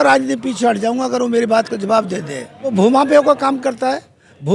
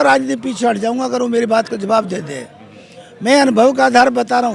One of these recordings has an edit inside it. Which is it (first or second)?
first